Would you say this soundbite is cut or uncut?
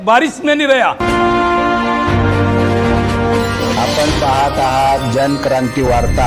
cut